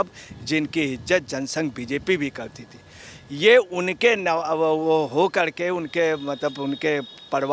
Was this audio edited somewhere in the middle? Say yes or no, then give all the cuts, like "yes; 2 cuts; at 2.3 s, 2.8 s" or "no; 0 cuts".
no; 0 cuts